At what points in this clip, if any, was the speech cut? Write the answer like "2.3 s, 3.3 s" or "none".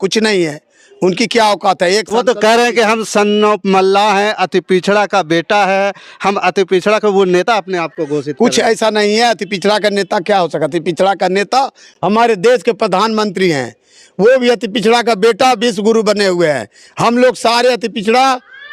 none